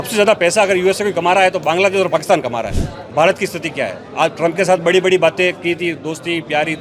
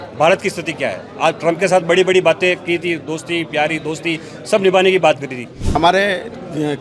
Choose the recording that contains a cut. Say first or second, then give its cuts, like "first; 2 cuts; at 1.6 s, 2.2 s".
second; 1 cut; at 5.7 s